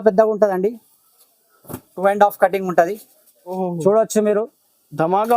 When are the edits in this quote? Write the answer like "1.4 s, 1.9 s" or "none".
3.6 s